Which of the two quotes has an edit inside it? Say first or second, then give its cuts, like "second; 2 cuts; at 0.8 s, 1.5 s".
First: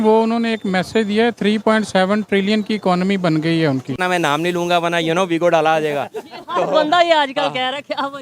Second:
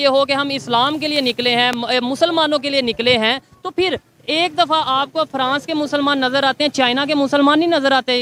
first; 1 cut; at 3.9 s